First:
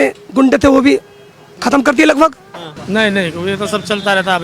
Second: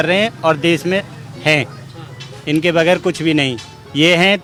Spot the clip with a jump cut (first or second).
first